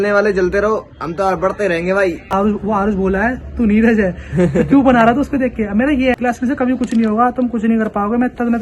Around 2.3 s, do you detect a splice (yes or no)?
yes